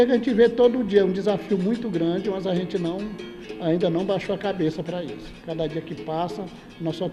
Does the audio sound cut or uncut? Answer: uncut